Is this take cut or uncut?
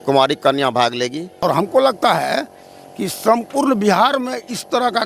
cut